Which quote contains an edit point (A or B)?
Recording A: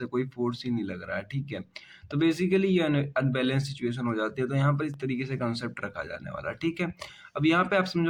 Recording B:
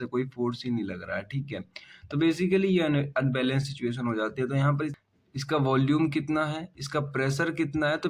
B